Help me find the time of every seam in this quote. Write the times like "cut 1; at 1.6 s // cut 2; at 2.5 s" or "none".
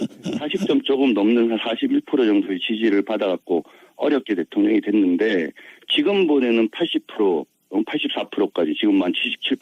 cut 1; at 2.0 s